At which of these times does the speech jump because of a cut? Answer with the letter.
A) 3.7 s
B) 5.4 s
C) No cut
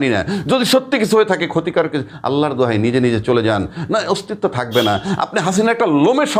C